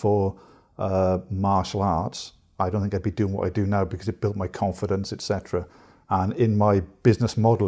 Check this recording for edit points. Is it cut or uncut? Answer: cut